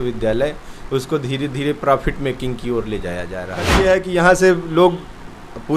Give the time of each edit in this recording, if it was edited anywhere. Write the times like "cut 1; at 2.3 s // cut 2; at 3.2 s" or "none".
cut 1; at 3.7 s